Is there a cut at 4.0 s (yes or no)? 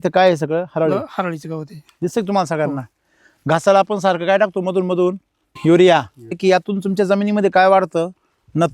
no